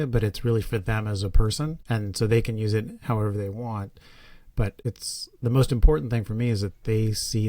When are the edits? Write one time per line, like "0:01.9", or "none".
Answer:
0:01.8
0:04.8